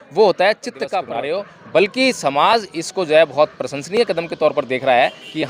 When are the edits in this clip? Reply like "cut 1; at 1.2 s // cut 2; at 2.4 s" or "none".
cut 1; at 1.1 s

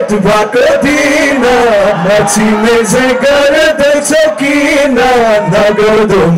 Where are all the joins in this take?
none

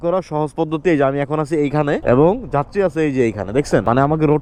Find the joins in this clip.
none

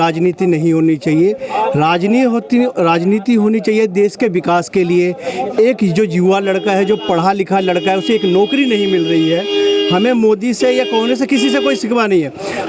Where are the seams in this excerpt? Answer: none

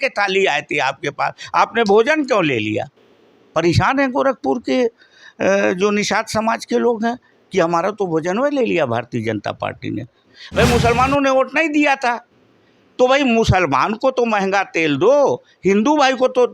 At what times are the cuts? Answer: cut 1; at 10.2 s

